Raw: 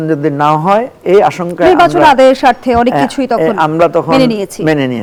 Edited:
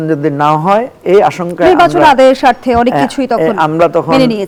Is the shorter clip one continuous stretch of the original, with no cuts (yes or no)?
yes